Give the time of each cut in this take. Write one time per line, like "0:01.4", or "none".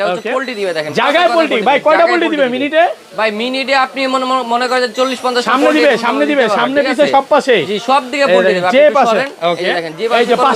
none